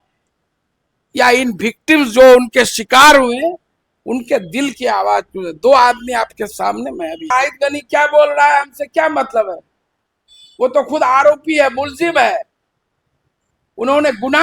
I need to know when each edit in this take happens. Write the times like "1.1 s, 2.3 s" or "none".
7.3 s